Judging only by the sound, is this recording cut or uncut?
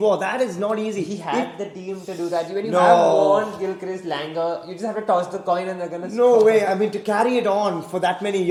uncut